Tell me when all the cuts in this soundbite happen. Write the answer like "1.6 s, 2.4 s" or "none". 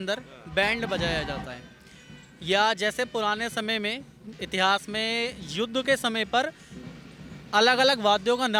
none